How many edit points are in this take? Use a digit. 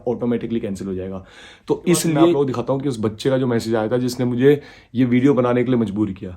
1